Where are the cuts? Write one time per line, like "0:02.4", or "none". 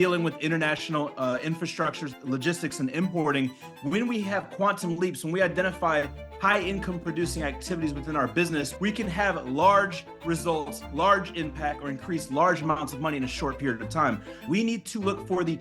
0:03.7
0:08.7
0:14.4